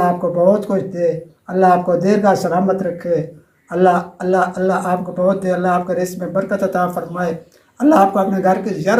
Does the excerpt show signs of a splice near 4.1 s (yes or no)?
no